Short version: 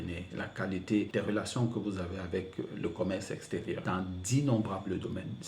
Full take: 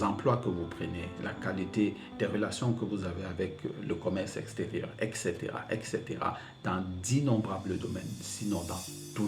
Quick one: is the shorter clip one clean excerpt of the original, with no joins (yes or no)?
no